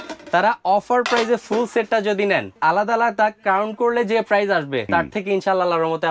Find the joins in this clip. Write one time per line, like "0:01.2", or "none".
0:02.5
0:04.9